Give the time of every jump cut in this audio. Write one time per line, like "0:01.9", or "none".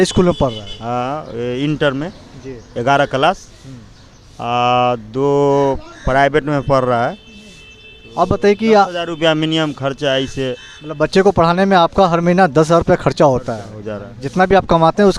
none